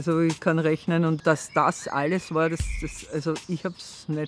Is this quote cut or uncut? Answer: cut